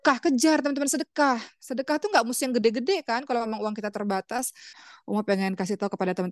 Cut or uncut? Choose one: cut